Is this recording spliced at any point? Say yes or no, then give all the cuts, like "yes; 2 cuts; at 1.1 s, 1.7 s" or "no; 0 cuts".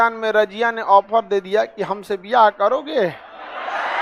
no; 0 cuts